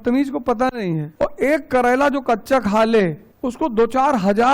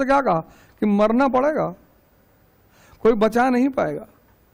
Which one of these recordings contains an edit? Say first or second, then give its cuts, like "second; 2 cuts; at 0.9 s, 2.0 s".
first; 2 cuts; at 1.1 s, 3.3 s